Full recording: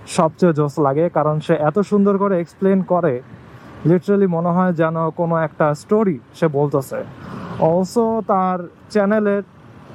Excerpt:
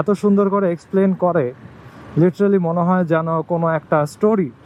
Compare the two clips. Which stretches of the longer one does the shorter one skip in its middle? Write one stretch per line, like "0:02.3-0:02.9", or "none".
none